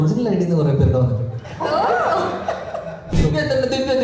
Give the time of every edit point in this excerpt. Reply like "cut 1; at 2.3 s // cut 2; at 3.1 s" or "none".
cut 1; at 3.1 s